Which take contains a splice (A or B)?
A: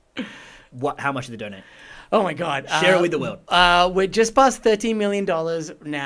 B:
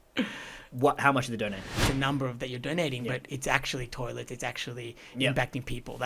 B